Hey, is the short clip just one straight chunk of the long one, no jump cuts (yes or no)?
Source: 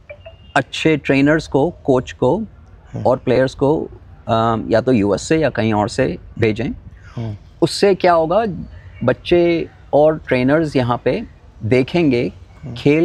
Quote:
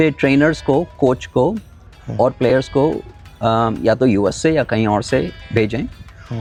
yes